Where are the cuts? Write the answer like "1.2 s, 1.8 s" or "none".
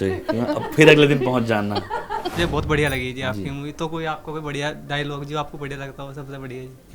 2.2 s